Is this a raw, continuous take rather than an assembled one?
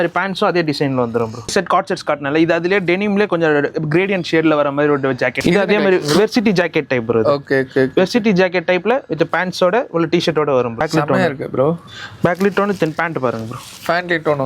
no; 3 cuts; at 1.5 s, 5.4 s, 10.8 s

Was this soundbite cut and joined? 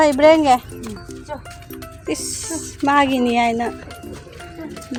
no; 0 cuts

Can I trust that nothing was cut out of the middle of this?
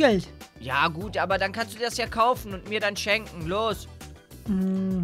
yes; 0 cuts

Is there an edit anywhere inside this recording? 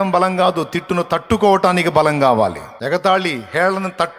yes; 1 cut; at 2.7 s

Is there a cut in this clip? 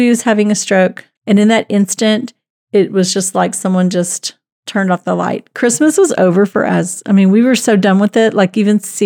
yes; 1 cut; at 1.0 s

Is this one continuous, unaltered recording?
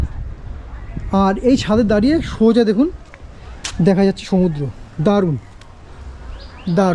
yes; 0 cuts

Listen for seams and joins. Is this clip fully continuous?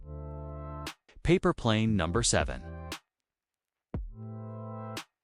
no; 2 cuts; at 1.3 s, 2.6 s

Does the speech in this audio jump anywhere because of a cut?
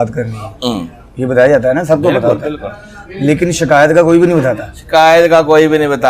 no; 0 cuts

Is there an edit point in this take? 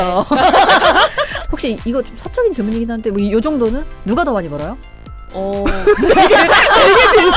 yes; 1 cut; at 1.3 s

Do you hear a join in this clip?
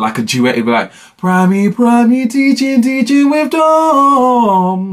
no; 0 cuts

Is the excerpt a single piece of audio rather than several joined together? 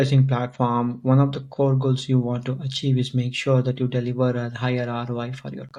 yes; 0 cuts

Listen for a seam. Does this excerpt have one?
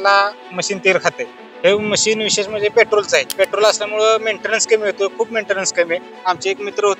yes; 2 cuts; at 3.3 s, 6.1 s

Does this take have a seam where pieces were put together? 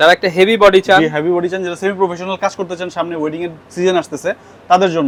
no; 0 cuts

